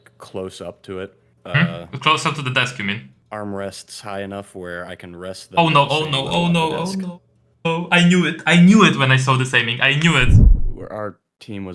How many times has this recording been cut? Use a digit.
2